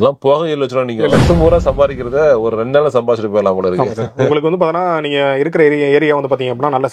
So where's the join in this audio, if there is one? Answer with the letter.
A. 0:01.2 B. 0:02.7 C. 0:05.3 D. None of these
A